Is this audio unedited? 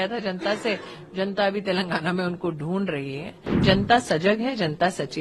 no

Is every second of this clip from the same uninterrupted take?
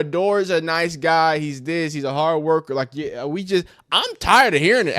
yes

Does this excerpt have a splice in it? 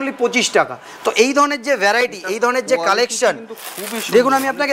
no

